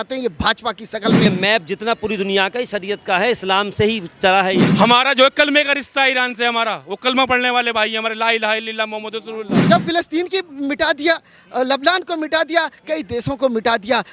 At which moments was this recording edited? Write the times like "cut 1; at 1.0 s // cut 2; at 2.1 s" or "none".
cut 1; at 1.3 s // cut 2; at 4.7 s // cut 3; at 9.6 s